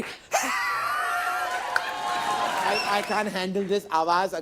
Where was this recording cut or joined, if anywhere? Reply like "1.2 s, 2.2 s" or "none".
2.8 s